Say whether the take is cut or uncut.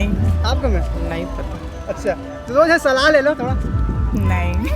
uncut